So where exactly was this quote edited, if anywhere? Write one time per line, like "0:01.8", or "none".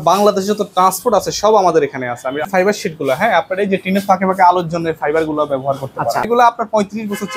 0:02.4
0:06.3